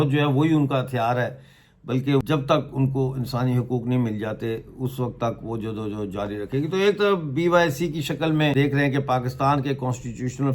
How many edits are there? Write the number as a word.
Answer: two